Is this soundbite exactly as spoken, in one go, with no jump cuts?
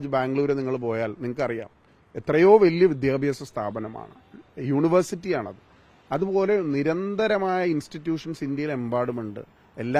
yes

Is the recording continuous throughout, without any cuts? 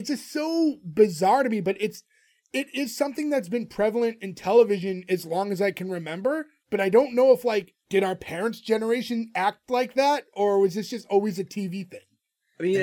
no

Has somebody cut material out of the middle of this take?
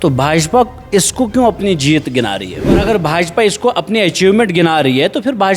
yes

